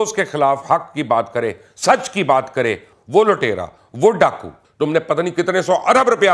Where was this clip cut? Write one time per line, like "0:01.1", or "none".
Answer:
0:02.9
0:04.6